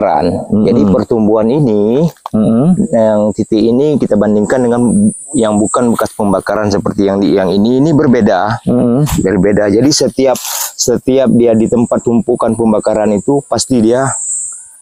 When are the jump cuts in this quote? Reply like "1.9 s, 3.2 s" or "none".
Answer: none